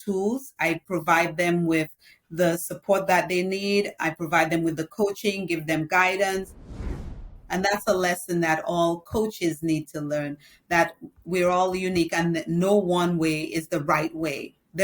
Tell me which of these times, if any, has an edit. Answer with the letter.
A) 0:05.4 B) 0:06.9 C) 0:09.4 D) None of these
B